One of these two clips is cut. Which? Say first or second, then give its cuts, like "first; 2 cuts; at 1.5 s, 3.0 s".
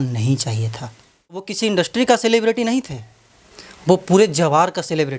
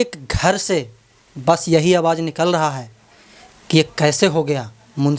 first; 1 cut; at 1.5 s